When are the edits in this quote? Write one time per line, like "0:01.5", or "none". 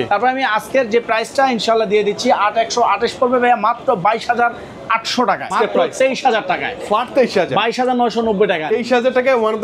0:05.5